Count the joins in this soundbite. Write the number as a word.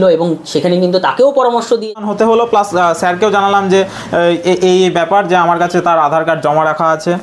one